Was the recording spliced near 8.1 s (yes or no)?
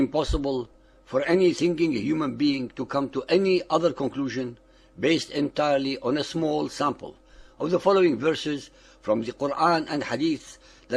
yes